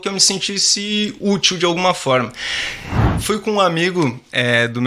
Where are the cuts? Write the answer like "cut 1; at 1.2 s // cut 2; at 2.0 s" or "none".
cut 1; at 3.1 s